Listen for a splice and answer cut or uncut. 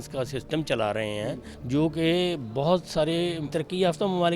cut